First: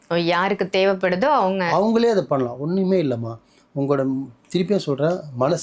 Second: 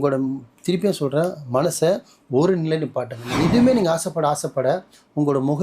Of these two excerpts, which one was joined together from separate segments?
second; 1 cut; at 3.2 s

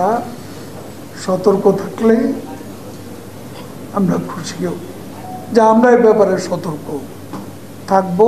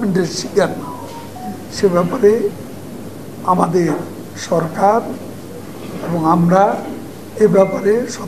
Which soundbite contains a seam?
first; 1 cut; at 4.8 s

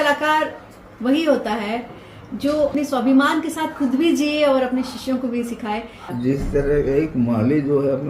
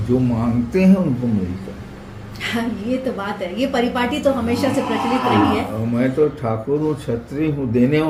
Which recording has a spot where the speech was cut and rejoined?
first; 2 cuts; at 2.7 s, 6.0 s

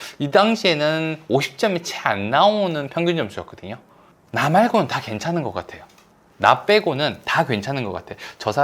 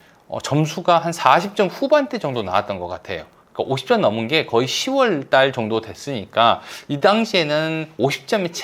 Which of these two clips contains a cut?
first; 1 cut; at 4.0 s

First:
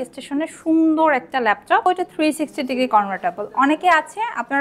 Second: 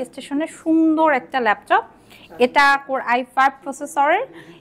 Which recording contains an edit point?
first; 1 cut; at 1.8 s

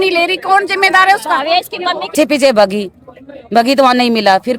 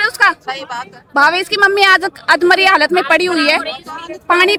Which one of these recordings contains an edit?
first; 1 cut; at 2.1 s

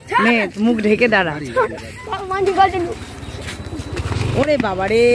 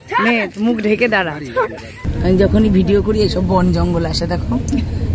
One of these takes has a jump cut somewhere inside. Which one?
second; 1 cut; at 2.0 s

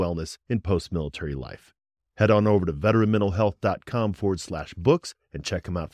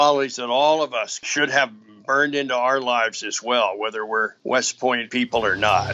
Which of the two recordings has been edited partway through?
second; 3 cuts; at 1.2 s, 4.3 s, 5.1 s

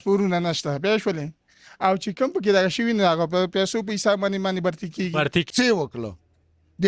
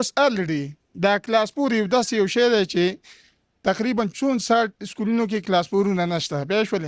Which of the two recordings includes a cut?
first; 1 cut; at 5.5 s

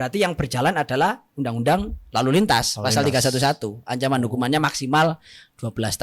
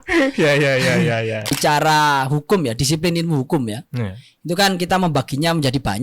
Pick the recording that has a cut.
second; 1 cut; at 1.5 s

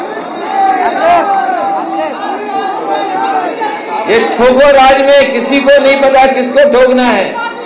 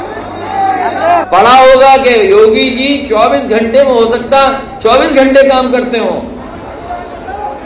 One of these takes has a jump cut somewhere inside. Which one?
second; 1 cut; at 1.3 s

